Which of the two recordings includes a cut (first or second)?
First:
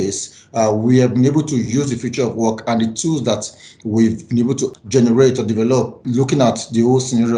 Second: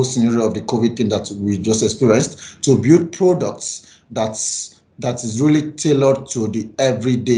first